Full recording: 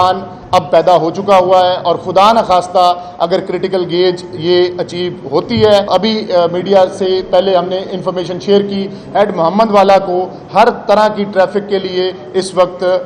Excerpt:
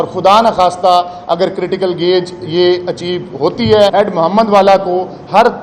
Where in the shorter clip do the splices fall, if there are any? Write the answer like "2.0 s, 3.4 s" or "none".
3.9 s